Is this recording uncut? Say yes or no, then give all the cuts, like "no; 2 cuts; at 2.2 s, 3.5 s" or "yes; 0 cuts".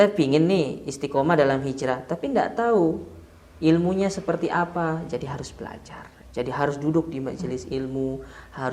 yes; 0 cuts